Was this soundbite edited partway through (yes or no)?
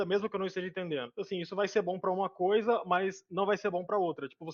no